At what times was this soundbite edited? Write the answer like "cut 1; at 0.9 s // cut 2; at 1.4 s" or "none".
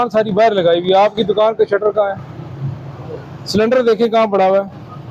none